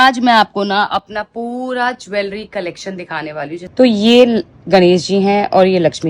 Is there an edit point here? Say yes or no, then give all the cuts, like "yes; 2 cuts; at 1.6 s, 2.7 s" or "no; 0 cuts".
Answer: yes; 1 cut; at 3.6 s